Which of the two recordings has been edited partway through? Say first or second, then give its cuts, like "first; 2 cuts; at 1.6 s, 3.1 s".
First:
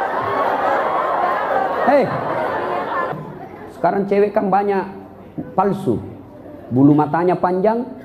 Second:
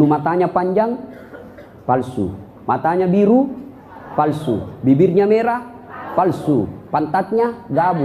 first; 1 cut; at 3.1 s